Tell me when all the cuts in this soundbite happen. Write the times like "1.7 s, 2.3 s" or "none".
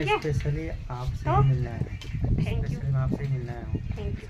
none